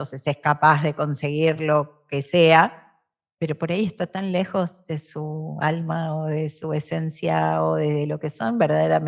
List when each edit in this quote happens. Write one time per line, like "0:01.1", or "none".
none

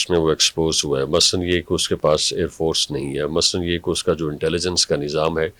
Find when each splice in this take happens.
none

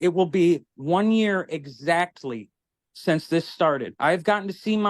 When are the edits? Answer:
0:03.9

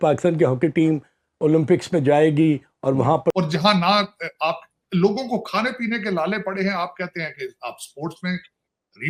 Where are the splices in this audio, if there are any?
0:03.3

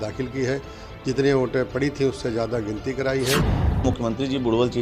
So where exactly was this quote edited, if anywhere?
0:03.8

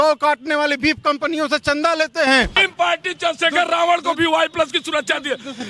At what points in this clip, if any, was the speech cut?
0:02.6

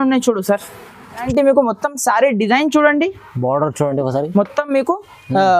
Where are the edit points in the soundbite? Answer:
0:01.3

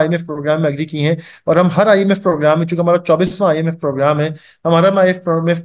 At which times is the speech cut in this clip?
none

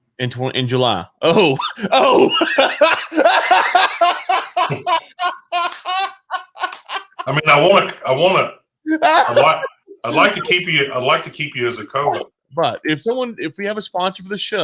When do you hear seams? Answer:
0:12.4

